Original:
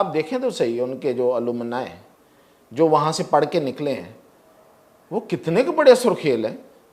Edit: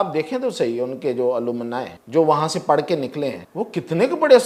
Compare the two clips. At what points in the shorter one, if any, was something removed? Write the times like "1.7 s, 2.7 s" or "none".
1.9 s, 3.4 s